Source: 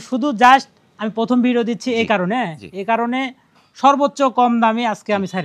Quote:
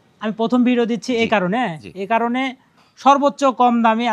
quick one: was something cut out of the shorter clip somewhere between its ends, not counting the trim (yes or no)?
no